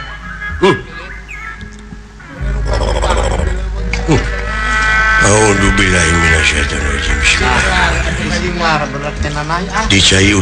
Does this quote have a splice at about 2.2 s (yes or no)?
yes